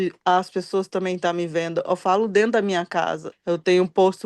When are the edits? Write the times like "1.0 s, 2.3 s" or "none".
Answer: 3.3 s